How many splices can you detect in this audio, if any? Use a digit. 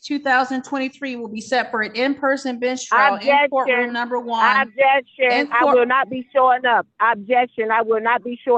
0